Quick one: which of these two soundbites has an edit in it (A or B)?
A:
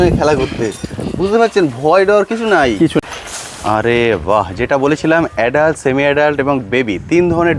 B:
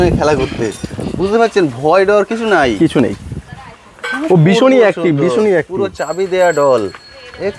A